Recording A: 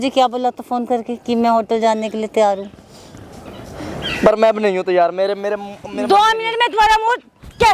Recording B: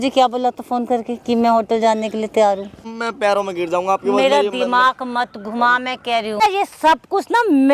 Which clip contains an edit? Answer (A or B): B